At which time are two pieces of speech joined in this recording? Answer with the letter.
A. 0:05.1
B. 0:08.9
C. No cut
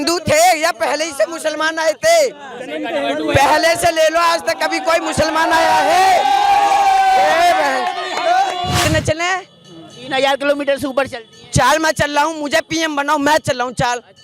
B